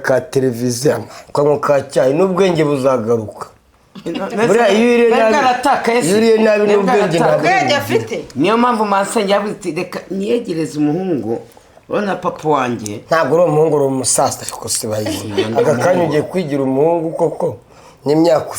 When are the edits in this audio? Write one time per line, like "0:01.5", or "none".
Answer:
0:01.2

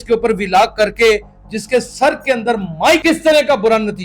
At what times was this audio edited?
0:03.0

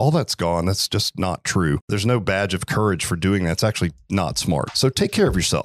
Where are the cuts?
0:01.9
0:04.7

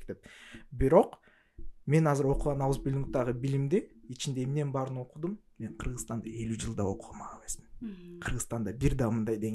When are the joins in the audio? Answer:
none

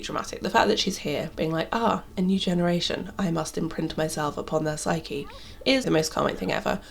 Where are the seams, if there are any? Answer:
0:05.9

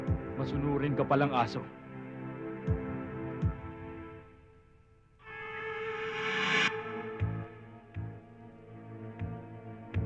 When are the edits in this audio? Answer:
none

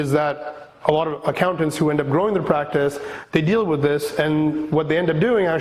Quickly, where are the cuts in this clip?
none

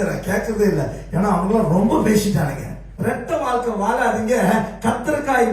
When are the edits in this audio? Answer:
0:02.9

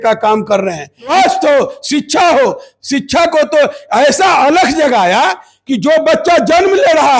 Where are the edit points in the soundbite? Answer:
0:01.1

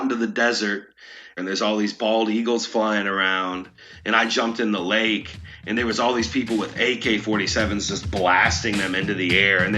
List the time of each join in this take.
0:01.2

